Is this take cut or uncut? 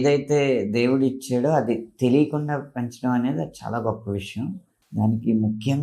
cut